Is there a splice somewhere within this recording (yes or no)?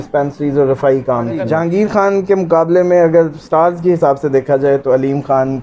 yes